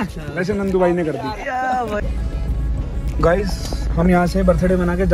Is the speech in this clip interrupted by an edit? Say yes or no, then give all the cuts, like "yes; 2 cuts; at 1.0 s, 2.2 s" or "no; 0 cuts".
yes; 1 cut; at 2.0 s